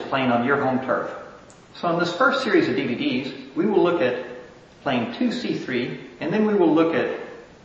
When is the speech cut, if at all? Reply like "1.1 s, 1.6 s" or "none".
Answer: none